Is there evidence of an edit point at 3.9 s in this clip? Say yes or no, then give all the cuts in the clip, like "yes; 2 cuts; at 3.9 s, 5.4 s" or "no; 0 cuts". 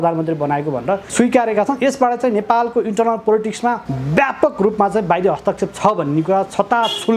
yes; 2 cuts; at 1.1 s, 3.9 s